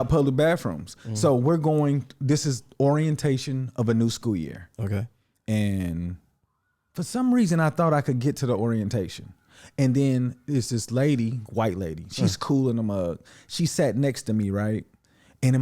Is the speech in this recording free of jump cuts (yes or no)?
yes